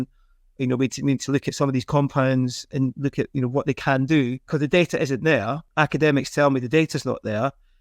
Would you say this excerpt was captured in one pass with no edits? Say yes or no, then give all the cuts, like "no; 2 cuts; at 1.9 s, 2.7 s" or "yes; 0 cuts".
no; 3 cuts; at 2.7 s, 4.4 s, 5.6 s